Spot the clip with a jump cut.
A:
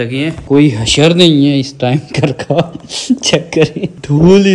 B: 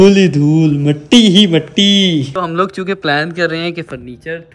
B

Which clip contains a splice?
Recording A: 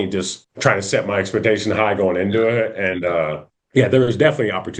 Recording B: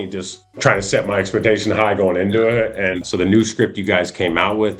B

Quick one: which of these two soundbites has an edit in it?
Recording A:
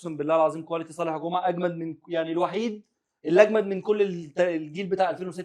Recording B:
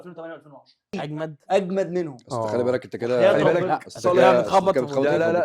B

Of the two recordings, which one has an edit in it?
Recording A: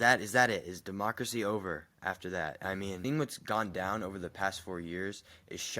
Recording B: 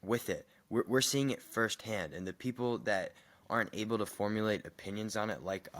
A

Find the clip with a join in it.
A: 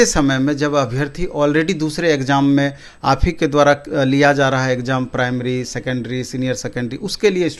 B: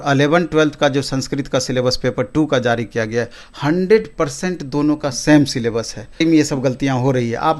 B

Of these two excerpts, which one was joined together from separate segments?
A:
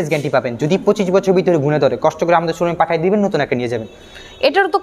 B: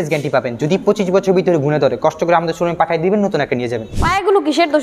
B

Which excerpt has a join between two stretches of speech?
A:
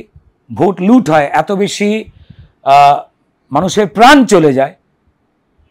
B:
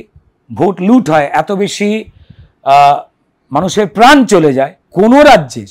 B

